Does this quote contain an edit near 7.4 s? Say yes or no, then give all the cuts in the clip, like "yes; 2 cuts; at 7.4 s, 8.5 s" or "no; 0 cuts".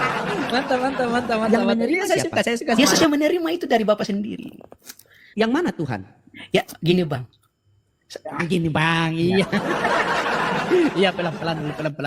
no; 1 cut; at 2.8 s